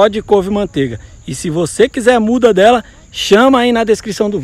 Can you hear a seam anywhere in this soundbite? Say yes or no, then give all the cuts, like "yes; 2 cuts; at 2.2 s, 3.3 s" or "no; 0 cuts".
no; 0 cuts